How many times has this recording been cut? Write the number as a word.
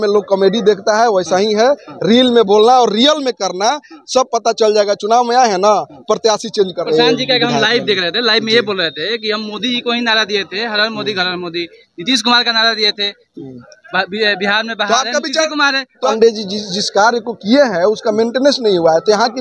two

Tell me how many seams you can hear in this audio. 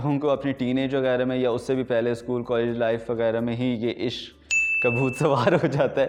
zero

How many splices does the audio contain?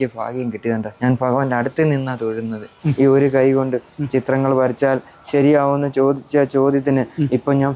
two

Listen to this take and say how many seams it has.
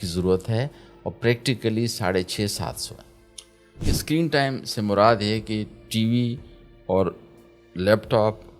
one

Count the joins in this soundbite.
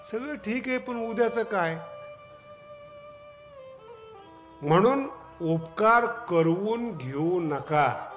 zero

